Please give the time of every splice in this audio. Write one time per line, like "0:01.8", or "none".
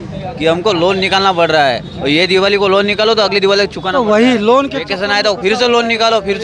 none